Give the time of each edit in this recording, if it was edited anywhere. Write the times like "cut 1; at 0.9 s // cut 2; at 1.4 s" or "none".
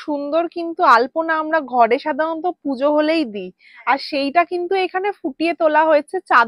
none